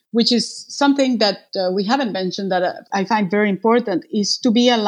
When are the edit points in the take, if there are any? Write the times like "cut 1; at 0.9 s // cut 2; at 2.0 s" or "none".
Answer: cut 1; at 1.5 s // cut 2; at 2.8 s